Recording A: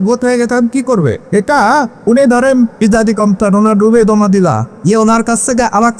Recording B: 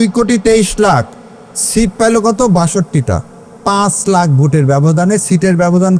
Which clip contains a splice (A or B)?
A